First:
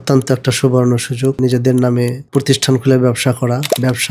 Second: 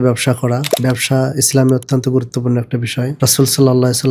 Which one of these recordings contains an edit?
first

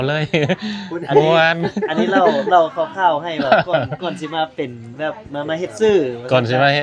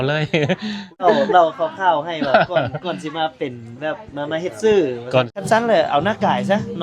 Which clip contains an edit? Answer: second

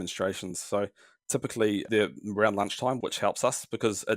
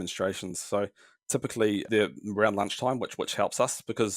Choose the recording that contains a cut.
first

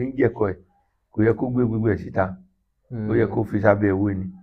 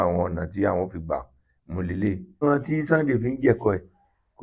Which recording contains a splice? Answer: second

